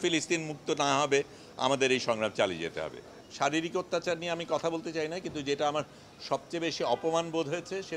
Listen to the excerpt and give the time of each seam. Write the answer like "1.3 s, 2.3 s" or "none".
3.1 s